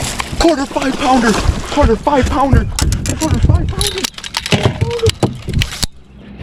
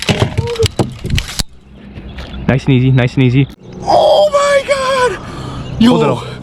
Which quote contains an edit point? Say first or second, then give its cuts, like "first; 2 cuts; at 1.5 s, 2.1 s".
second; 1 cut; at 3.7 s